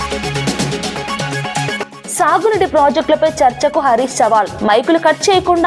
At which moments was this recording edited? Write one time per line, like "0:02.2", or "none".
0:01.9